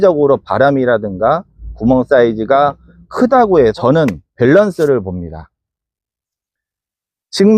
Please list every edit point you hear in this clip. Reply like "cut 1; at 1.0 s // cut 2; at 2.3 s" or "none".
cut 1; at 3.7 s